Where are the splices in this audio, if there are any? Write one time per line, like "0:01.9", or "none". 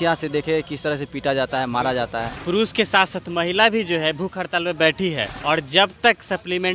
0:02.3
0:05.3